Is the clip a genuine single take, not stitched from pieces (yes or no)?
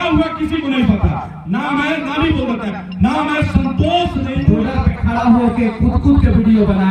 no